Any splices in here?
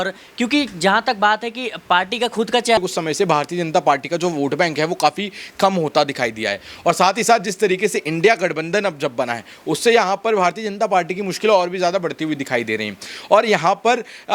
yes; 1 cut; at 2.8 s

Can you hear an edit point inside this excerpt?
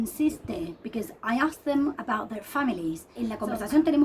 yes; 1 cut; at 3.1 s

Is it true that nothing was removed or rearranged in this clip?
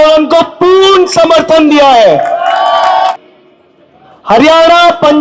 no; 1 cut; at 3.1 s

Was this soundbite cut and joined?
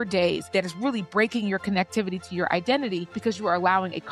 no; 0 cuts

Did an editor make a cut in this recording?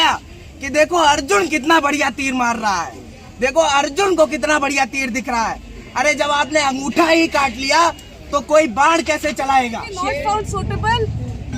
yes; 1 cut; at 9.9 s

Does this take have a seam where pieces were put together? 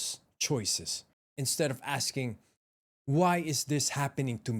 yes; 1 cut; at 1.3 s

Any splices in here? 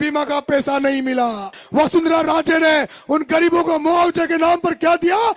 yes; 1 cut; at 1.5 s

